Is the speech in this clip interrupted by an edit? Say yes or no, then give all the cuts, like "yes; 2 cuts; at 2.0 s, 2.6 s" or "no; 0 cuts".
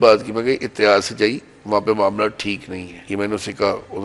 yes; 1 cut; at 2.9 s